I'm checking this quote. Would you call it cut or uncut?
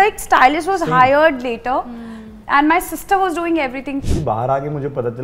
cut